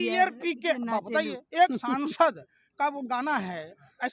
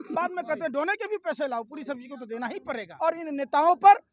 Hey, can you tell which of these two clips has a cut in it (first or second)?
second